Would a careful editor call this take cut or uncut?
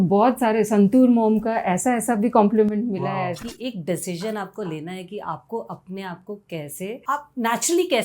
cut